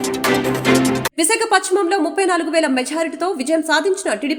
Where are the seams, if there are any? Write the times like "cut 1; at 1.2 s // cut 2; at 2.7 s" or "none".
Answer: cut 1; at 1.0 s